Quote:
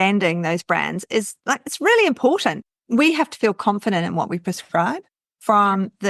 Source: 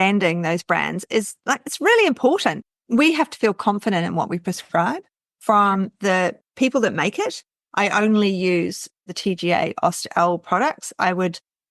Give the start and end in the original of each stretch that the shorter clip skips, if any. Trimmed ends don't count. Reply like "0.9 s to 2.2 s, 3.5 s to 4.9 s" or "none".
none